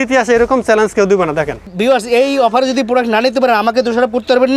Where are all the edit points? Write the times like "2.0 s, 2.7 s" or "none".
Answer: 1.7 s